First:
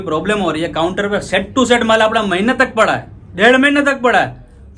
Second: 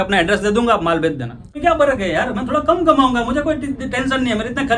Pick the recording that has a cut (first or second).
second